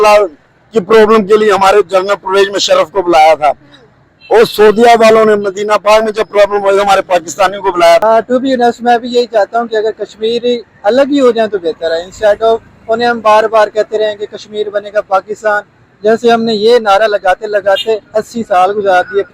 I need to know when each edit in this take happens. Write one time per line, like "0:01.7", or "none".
0:08.0